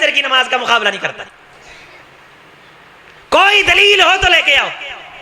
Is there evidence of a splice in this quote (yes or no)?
no